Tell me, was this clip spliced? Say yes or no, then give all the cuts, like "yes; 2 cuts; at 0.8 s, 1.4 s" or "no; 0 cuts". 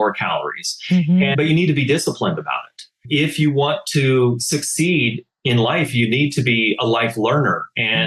yes; 2 cuts; at 1.3 s, 3.0 s